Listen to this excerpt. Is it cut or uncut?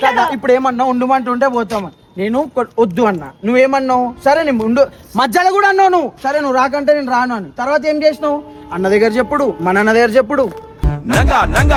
uncut